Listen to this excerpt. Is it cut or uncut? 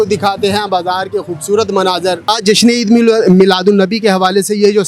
cut